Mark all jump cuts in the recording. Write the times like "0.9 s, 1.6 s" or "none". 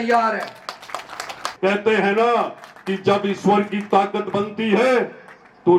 1.4 s